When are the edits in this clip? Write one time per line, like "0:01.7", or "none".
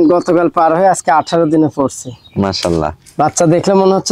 none

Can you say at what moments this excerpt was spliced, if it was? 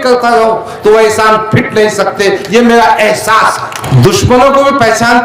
0:03.9

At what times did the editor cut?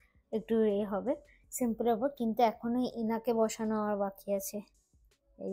none

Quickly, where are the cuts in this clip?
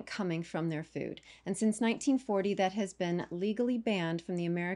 none

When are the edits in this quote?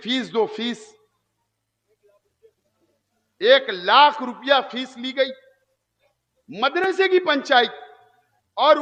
none

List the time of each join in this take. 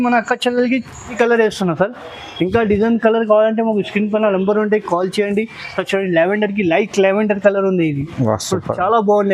0:01.1

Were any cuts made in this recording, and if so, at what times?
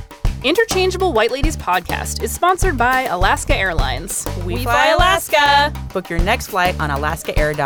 none

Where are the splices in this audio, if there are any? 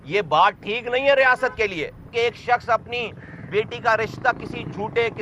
0:02.1

